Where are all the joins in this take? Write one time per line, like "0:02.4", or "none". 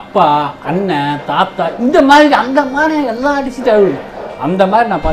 none